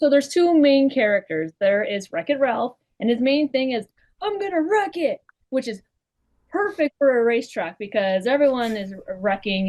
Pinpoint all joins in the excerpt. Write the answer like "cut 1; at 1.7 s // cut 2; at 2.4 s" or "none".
none